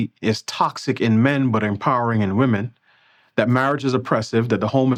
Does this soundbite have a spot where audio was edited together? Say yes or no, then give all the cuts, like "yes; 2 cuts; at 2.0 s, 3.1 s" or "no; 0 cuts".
no; 0 cuts